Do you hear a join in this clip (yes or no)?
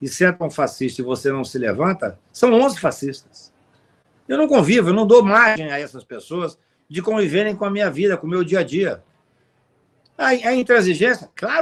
no